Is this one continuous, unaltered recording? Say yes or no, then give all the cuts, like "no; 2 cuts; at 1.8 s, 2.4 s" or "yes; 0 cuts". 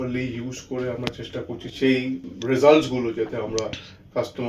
no; 2 cuts; at 1.7 s, 2.3 s